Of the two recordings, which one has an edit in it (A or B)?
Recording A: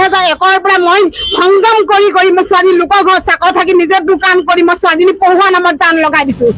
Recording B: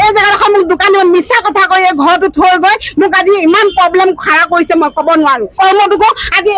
B